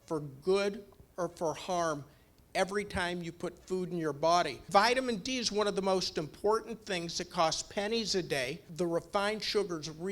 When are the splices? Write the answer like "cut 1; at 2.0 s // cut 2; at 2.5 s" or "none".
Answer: cut 1; at 4.6 s // cut 2; at 8.6 s